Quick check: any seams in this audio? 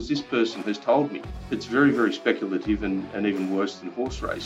yes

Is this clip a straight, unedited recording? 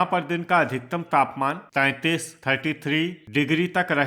yes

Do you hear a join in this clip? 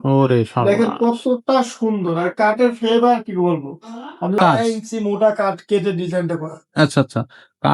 yes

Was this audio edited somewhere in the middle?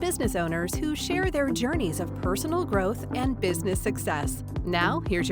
no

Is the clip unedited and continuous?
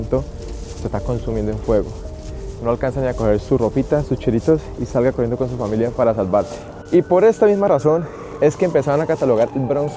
no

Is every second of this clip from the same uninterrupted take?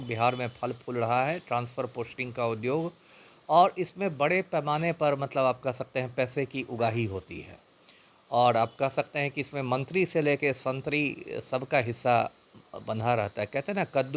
yes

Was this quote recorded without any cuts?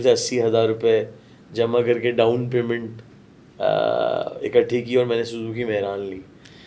yes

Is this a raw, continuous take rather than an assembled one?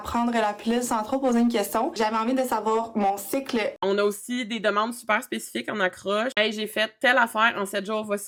yes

